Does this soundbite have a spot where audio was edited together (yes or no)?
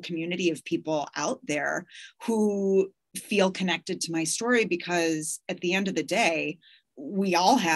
no